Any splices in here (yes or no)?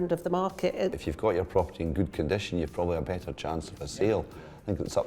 yes